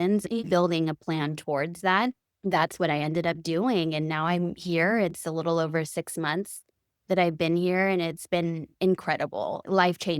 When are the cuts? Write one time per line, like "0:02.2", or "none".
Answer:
0:02.3